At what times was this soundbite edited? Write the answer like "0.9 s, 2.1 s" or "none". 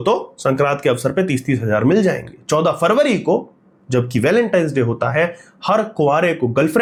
none